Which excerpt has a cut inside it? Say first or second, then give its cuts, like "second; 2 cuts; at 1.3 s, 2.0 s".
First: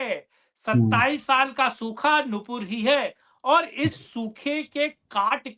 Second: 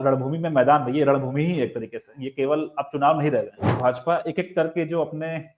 second; 1 cut; at 3.8 s